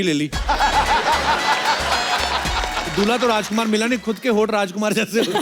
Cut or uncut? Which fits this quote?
uncut